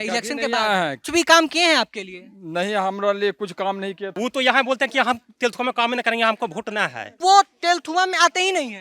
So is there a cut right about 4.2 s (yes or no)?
yes